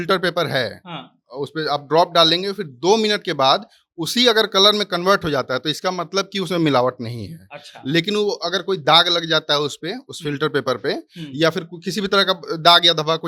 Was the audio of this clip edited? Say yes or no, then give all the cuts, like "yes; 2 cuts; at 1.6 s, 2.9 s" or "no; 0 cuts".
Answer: no; 0 cuts